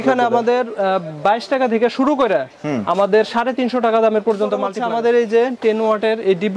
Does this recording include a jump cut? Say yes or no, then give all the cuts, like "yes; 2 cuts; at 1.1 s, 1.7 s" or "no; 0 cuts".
yes; 1 cut; at 4.5 s